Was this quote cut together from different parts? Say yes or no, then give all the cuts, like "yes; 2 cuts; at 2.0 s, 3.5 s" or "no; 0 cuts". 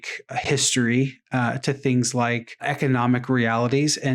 yes; 1 cut; at 2.6 s